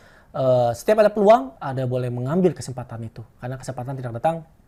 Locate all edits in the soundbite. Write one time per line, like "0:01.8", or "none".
none